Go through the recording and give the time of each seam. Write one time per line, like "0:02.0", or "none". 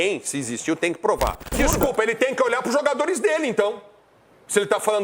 0:01.5